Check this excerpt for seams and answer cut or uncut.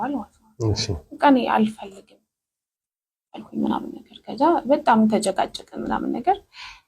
uncut